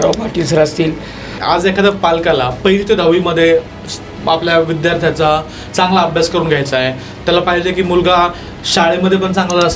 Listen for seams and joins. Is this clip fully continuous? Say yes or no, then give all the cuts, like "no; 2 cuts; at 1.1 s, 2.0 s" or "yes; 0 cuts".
no; 1 cut; at 1.3 s